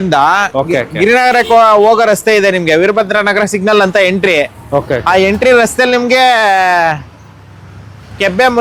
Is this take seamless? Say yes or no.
yes